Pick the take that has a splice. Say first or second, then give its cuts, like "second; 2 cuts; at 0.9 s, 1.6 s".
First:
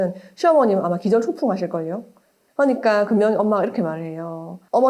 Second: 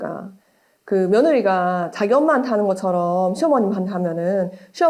first; 1 cut; at 2.1 s